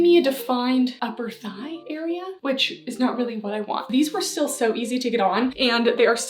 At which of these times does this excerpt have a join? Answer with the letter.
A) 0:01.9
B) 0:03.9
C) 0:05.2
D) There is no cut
B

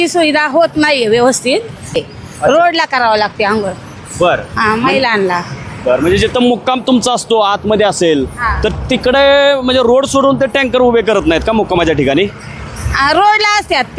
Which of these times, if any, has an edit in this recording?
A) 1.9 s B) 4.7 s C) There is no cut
A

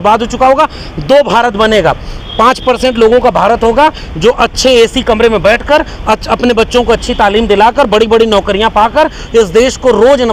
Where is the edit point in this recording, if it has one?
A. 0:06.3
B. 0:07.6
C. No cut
C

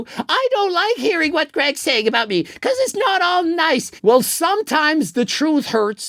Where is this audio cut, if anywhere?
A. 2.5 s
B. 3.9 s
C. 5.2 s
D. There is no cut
B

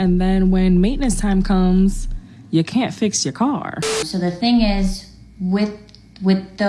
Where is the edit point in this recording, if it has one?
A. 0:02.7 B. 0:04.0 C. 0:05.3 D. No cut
B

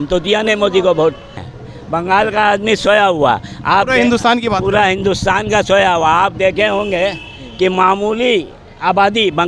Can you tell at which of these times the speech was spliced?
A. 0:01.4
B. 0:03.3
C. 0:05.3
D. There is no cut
A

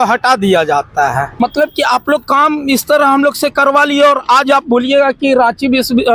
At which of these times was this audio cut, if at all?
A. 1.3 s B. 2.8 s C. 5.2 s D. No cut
A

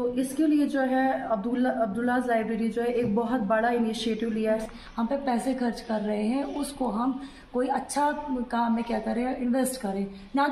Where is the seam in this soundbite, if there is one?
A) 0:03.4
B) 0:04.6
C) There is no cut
B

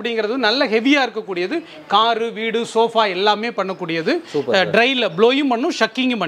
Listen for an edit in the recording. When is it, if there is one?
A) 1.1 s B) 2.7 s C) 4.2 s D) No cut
D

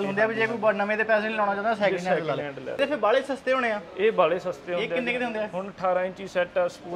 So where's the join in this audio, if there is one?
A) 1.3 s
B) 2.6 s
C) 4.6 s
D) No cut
D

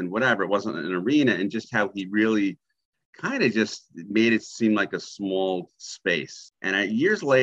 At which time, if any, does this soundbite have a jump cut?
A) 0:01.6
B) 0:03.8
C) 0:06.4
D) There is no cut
C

